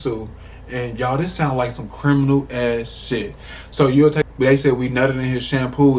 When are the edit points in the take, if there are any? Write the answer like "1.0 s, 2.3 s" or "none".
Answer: 4.3 s

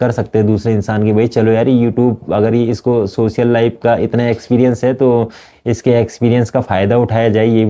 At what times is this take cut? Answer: none

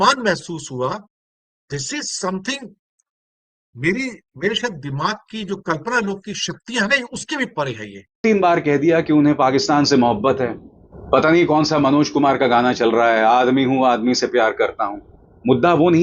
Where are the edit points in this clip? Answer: 8.2 s

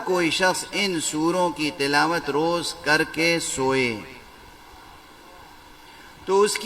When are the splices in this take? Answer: none

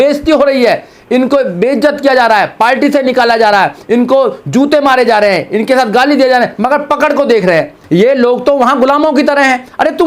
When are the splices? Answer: 7.8 s

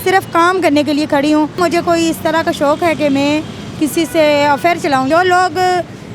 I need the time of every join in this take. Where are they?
1.6 s, 5.1 s

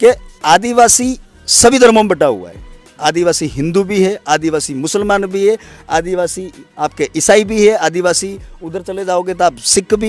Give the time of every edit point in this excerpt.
none

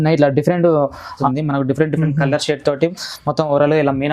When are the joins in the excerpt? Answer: 1.2 s

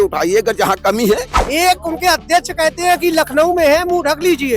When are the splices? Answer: 1.3 s

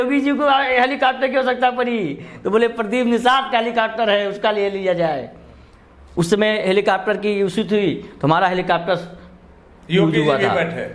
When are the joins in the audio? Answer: none

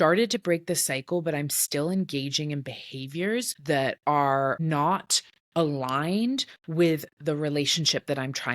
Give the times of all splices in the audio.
3.5 s, 4.6 s

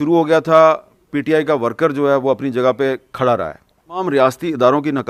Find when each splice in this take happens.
none

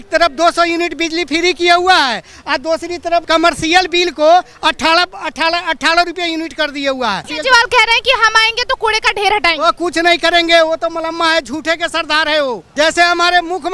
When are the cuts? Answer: 3.2 s, 7.3 s, 12.6 s

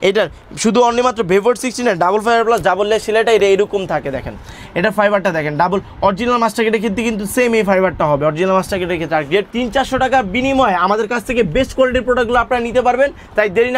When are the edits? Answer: 9.5 s

